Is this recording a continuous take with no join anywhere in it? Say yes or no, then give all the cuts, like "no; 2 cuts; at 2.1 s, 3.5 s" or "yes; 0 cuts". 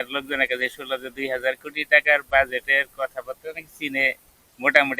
yes; 0 cuts